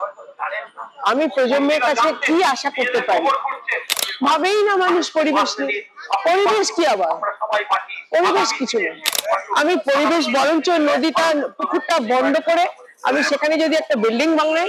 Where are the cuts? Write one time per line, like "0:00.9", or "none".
0:04.0